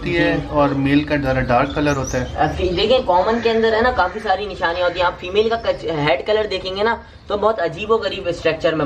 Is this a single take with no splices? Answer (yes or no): yes